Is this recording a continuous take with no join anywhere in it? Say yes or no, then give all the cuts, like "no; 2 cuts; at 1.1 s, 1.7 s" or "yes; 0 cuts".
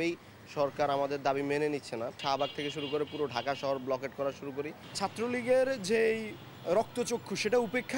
no; 2 cuts; at 2.2 s, 4.8 s